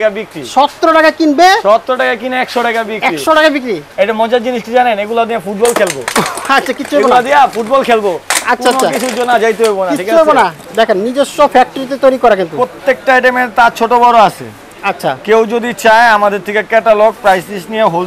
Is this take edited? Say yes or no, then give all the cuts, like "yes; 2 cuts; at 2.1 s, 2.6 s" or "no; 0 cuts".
yes; 2 cuts; at 3.9 s, 10.6 s